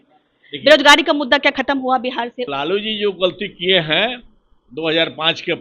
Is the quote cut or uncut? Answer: cut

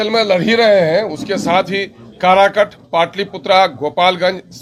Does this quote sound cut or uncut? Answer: uncut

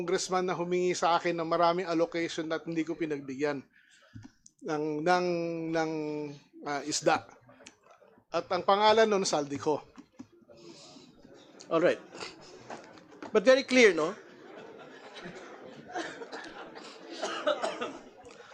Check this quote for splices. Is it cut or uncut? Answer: uncut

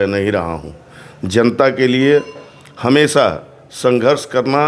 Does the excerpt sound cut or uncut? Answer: uncut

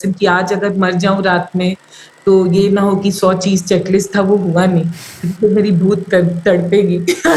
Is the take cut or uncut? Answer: uncut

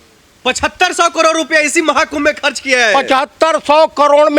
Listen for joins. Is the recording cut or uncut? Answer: uncut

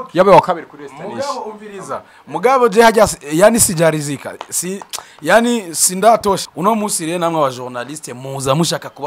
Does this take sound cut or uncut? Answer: cut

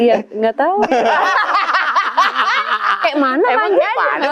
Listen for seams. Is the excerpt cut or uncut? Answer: uncut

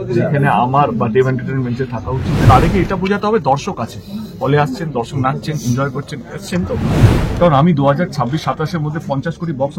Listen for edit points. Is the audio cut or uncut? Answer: cut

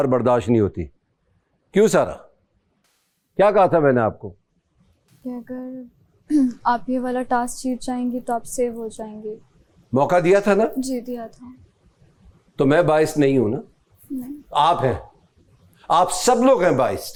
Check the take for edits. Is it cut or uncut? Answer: uncut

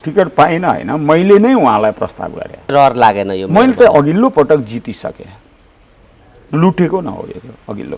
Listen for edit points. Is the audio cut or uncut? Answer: cut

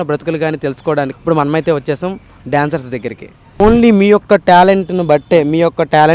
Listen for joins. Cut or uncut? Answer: cut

